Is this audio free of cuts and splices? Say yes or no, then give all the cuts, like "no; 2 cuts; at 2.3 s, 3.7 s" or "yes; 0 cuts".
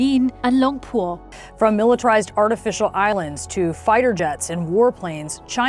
yes; 0 cuts